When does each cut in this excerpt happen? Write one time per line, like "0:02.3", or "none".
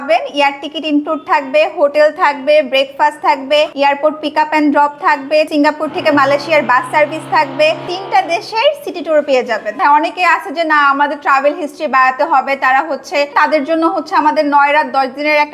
0:03.7
0:05.5
0:07.9
0:09.8
0:13.3

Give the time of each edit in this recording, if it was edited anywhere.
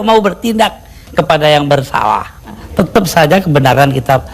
0:02.6

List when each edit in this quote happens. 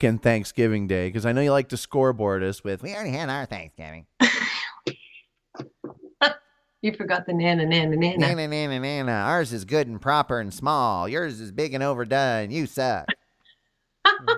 none

